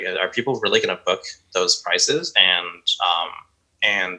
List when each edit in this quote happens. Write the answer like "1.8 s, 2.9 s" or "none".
none